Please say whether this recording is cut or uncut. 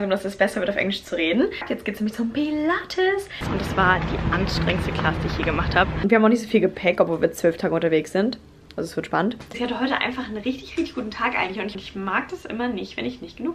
cut